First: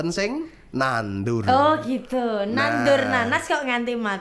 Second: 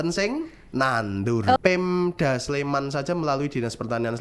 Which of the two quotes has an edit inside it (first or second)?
second